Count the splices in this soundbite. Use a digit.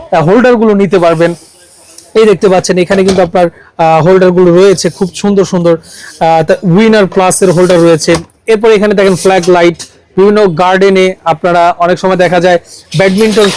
0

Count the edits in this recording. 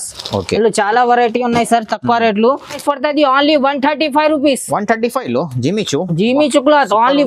1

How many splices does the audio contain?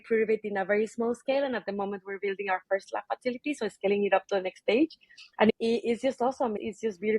1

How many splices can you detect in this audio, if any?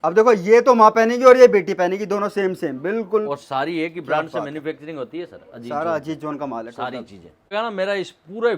1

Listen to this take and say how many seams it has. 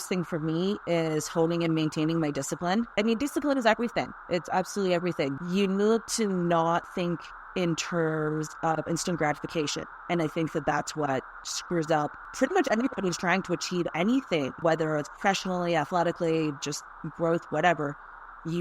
4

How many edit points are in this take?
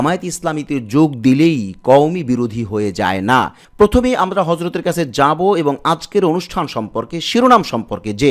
0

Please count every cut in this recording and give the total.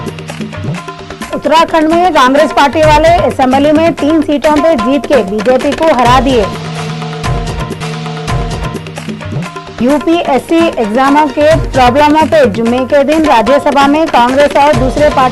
1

